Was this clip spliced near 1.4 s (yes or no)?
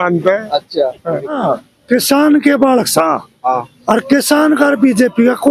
yes